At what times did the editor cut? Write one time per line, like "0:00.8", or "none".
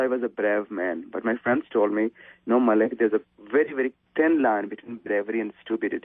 0:04.0